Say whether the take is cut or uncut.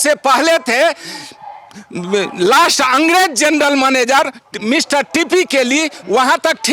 uncut